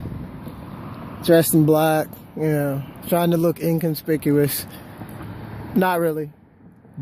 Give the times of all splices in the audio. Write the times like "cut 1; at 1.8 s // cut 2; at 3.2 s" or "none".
cut 1; at 3.4 s